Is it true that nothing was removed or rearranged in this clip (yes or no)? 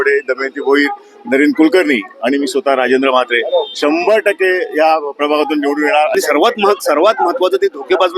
no